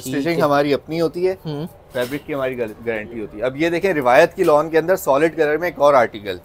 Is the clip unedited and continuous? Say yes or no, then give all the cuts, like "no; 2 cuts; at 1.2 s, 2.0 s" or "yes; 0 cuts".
yes; 0 cuts